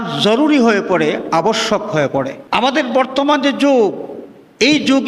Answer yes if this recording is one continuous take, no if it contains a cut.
no